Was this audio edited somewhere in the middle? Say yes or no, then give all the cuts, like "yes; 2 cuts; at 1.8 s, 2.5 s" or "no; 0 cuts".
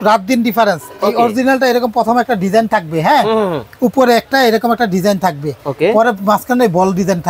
no; 0 cuts